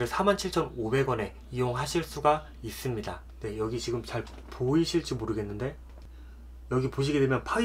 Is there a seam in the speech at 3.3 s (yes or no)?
yes